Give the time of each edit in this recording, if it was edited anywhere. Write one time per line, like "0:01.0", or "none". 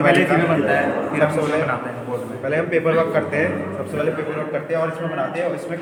none